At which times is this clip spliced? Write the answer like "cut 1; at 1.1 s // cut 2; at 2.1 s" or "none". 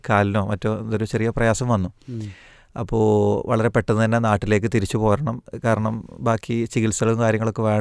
none